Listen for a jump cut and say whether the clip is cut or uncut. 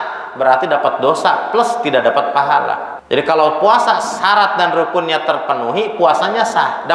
cut